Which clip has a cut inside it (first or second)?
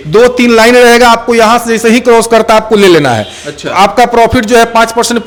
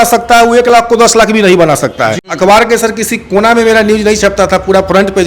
second